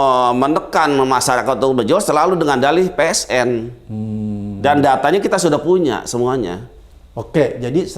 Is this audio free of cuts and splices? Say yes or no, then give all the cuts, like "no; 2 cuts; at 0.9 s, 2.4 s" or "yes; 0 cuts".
yes; 0 cuts